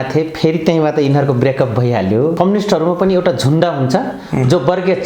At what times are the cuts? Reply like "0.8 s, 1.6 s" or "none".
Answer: 2.3 s